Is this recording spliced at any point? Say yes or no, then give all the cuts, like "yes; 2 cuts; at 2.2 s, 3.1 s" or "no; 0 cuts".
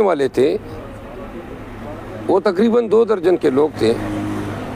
no; 0 cuts